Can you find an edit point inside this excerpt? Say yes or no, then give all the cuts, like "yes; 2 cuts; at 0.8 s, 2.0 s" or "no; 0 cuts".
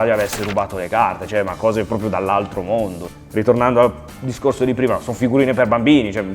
no; 0 cuts